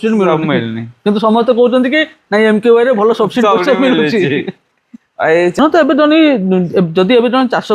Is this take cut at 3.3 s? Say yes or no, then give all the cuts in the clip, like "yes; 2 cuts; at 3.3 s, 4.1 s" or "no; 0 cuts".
no; 1 cut; at 5.6 s